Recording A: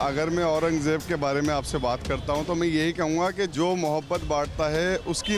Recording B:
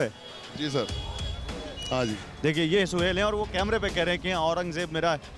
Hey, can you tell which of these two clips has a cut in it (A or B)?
A